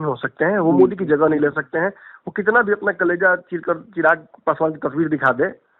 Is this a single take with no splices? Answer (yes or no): yes